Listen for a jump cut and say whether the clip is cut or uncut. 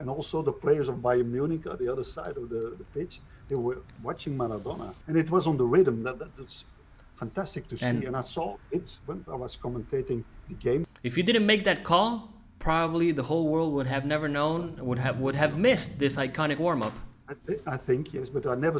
cut